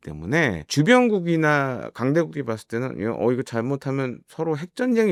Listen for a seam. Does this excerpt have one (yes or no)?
no